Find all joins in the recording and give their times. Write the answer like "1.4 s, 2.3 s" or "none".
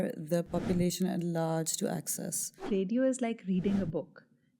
2.7 s

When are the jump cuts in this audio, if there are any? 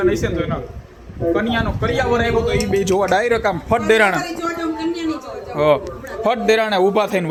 none

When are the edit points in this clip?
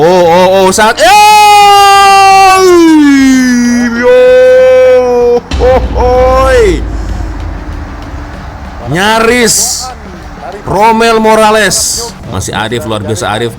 12.1 s

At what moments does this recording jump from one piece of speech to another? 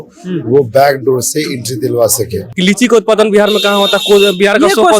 2.4 s

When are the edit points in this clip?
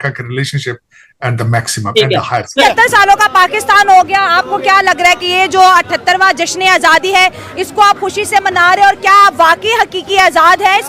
2.7 s

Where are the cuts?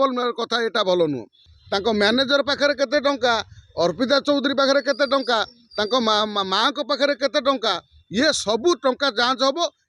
1.4 s

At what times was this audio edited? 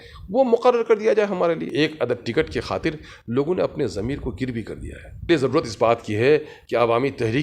1.7 s, 5.3 s

